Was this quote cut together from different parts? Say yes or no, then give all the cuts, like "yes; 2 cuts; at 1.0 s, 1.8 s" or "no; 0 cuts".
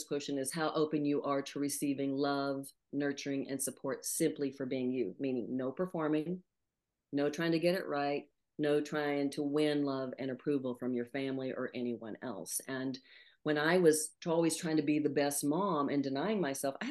no; 0 cuts